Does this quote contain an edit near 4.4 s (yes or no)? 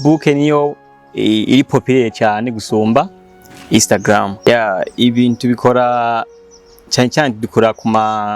yes